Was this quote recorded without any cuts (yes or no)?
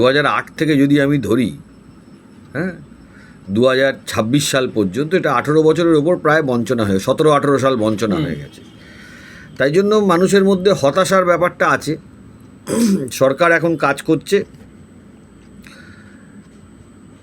yes